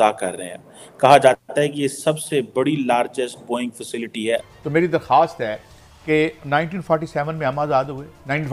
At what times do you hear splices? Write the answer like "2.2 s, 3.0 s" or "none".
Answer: 4.4 s